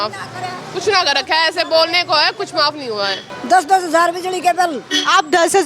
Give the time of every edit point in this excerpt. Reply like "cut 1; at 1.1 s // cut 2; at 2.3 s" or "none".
cut 1; at 3.3 s